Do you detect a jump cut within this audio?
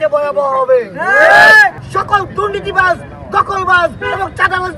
yes; 1 cut; at 1.8 s

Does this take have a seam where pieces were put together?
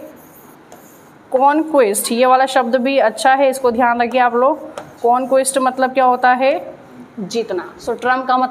no; 0 cuts

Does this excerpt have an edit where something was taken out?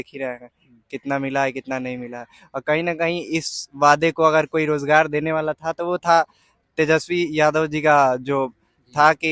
no; 0 cuts

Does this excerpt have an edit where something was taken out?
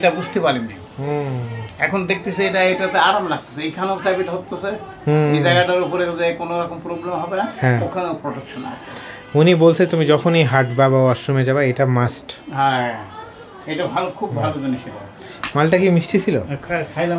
no; 0 cuts

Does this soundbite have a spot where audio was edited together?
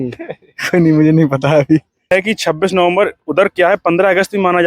yes; 1 cut; at 2.1 s

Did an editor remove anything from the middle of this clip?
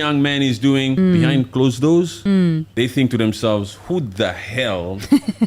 yes; 2 cuts; at 1.0 s, 2.4 s

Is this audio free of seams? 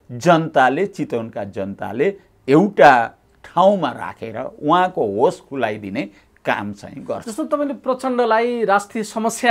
yes; 0 cuts

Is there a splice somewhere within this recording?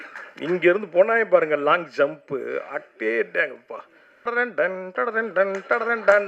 yes; 1 cut; at 4.3 s

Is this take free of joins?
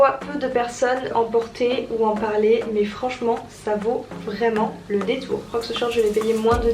no; 2 cuts; at 1.1 s, 5.5 s

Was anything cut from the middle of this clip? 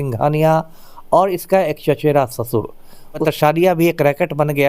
yes; 1 cut; at 3.2 s

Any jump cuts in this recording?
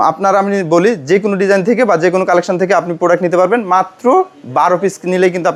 no; 0 cuts

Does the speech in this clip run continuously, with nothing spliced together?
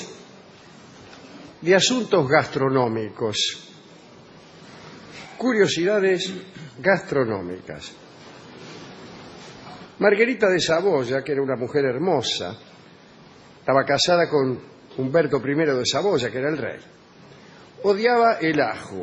yes; 0 cuts

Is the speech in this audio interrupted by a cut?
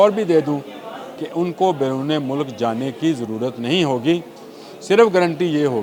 no; 0 cuts

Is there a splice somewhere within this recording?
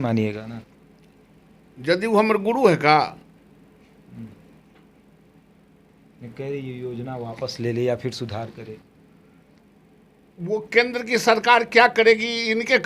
no; 0 cuts

